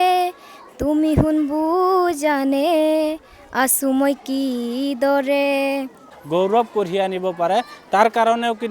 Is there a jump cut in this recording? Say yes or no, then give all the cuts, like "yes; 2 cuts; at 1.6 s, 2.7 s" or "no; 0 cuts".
yes; 1 cut; at 6.1 s